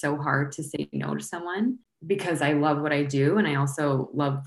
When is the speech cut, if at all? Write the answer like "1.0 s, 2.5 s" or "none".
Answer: 1.9 s

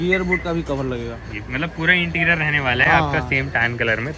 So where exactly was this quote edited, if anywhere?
none

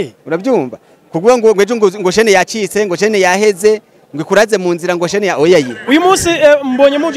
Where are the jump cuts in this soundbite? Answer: 5.8 s

